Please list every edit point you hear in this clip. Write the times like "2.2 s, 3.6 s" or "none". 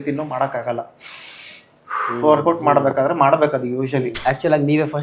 4.1 s